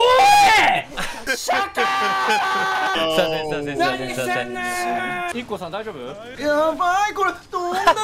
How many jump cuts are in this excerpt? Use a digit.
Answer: 4